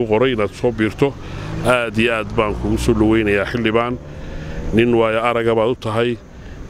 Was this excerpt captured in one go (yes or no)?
yes